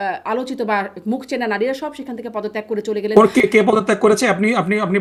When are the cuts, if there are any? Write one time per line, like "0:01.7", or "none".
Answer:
none